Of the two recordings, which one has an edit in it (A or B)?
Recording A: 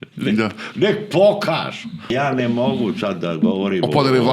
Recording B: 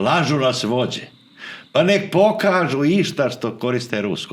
A